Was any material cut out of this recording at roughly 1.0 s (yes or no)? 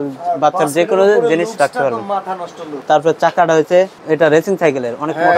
no